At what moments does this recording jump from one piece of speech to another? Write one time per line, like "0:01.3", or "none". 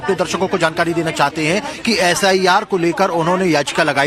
none